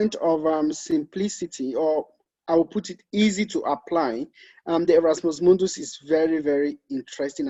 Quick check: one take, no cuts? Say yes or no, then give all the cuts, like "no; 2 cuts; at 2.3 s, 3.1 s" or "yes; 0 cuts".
yes; 0 cuts